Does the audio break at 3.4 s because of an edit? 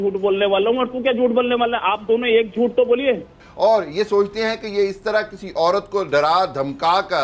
yes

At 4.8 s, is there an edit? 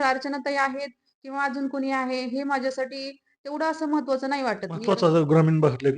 yes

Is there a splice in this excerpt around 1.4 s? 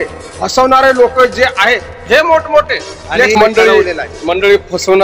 no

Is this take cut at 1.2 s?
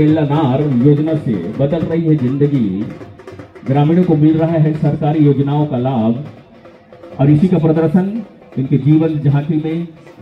no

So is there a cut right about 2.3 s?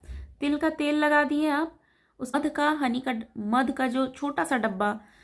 yes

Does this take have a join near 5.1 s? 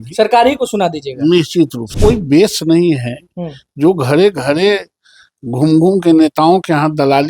no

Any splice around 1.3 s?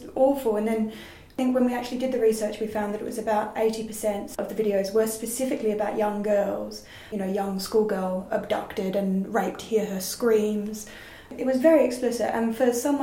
yes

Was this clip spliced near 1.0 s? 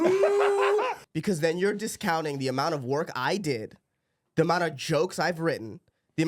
yes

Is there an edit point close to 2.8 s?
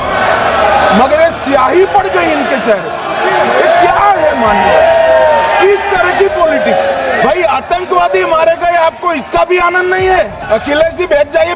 no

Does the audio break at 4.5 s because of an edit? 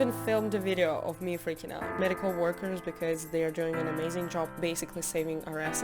yes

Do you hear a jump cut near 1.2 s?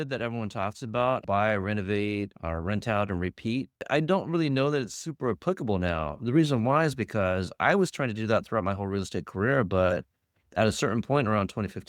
yes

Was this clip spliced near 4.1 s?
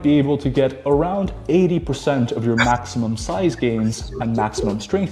no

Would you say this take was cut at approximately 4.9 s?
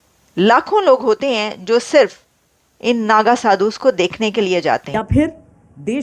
yes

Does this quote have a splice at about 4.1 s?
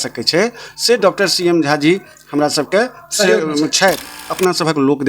yes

